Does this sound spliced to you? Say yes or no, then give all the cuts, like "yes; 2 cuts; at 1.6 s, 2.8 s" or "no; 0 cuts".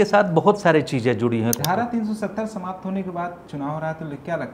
yes; 1 cut; at 1.6 s